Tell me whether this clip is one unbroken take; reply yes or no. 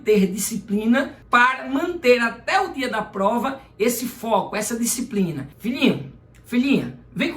no